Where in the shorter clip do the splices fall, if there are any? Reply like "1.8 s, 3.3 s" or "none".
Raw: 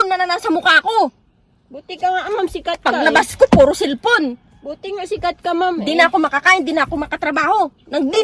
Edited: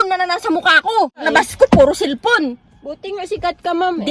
1.2 s